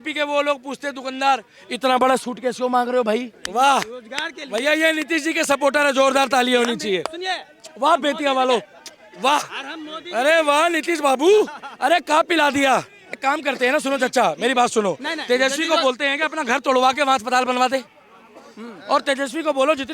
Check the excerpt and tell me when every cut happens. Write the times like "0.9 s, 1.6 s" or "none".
3.4 s, 13.2 s